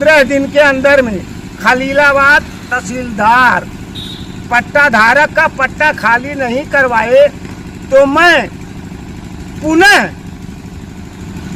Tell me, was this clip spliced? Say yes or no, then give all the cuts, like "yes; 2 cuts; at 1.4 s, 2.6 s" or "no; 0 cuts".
no; 0 cuts